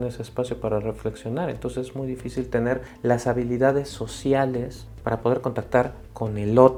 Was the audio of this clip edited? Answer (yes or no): no